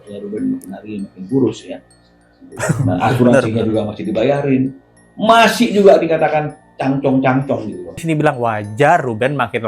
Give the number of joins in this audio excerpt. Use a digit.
1